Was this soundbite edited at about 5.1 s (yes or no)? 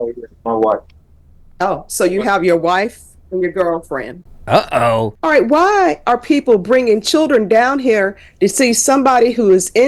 yes